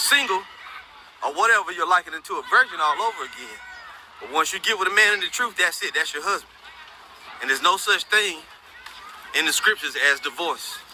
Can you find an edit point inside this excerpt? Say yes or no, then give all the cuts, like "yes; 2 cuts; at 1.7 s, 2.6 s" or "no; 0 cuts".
yes; 1 cut; at 5.8 s